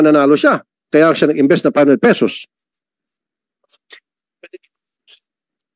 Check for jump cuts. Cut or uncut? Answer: uncut